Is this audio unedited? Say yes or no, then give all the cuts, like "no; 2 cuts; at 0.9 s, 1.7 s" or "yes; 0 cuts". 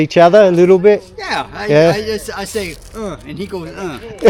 yes; 0 cuts